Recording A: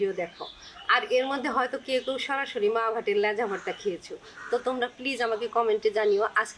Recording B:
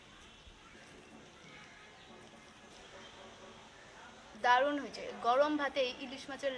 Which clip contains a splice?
B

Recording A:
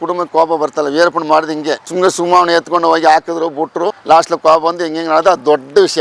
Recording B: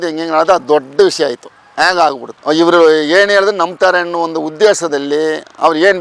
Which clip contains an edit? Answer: B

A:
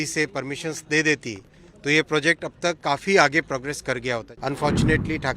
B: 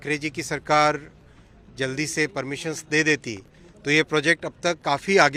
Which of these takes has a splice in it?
A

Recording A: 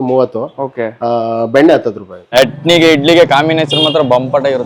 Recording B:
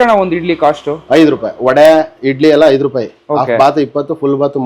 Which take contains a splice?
A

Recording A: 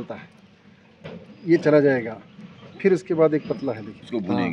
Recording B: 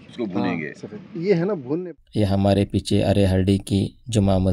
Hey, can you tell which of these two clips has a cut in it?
B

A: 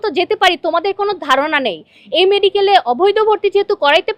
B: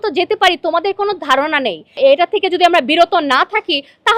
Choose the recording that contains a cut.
B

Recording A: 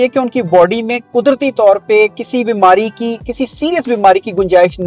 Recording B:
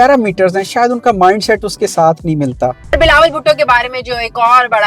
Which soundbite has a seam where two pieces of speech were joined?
B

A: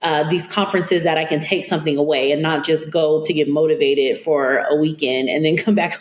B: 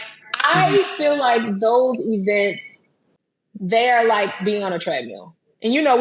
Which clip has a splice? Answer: B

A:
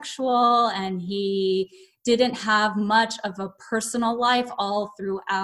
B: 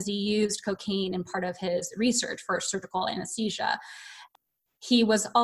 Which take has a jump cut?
B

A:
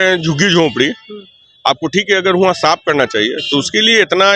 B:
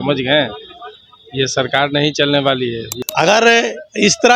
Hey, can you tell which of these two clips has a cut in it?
B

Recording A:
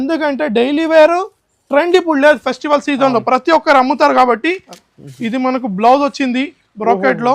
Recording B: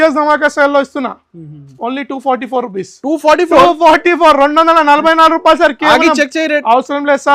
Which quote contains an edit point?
A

